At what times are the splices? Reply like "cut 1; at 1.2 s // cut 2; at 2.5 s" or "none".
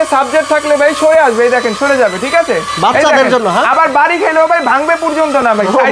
none